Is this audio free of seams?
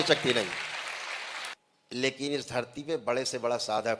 no; 1 cut; at 1.5 s

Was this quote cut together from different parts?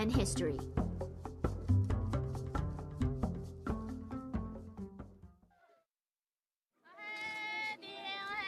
no; 0 cuts

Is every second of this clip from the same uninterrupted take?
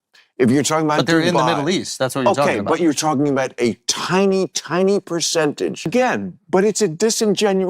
no; 1 cut; at 5.9 s

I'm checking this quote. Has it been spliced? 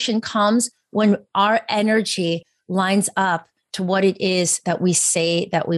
no; 0 cuts

